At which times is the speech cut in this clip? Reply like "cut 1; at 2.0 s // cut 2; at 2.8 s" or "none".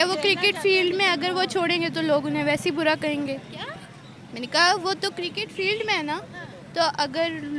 none